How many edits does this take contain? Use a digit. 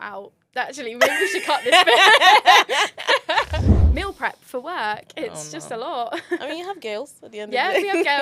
1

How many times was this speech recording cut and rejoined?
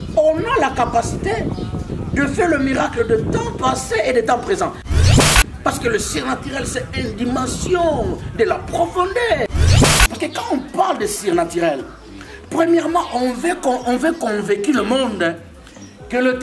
2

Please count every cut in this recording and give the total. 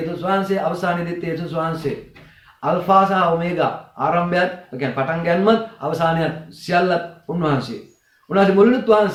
0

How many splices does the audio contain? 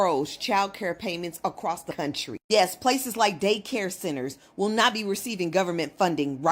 1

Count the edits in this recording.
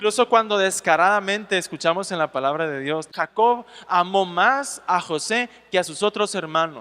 1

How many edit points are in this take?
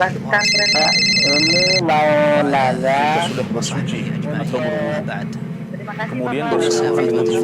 1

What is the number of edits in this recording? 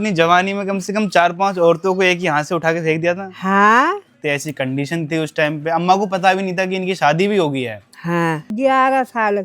2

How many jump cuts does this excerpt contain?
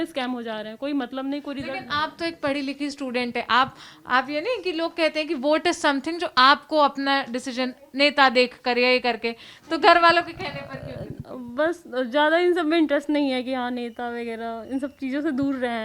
0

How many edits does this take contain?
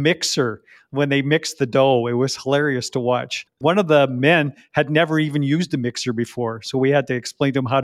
0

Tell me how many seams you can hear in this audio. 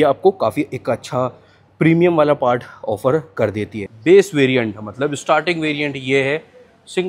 1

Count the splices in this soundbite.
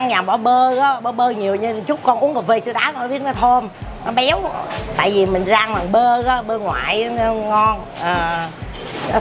0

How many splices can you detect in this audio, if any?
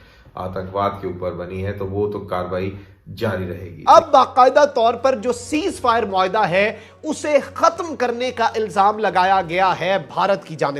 1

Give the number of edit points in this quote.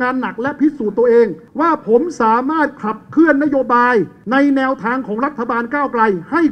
2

